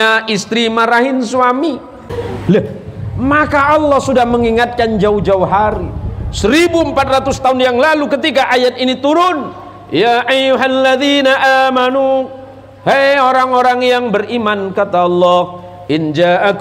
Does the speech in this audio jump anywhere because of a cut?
yes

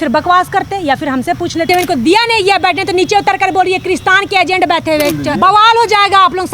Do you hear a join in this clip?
yes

